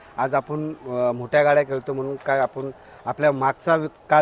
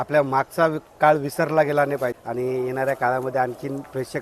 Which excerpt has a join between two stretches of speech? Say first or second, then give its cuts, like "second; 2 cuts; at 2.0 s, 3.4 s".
second; 1 cut; at 2.1 s